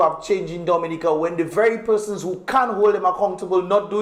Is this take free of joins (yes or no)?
yes